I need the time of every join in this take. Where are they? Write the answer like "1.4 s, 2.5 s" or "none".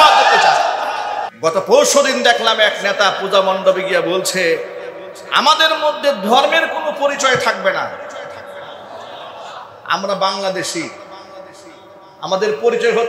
1.2 s